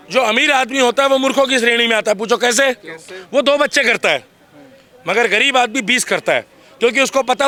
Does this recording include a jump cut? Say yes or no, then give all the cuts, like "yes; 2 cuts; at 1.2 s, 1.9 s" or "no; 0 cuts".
no; 0 cuts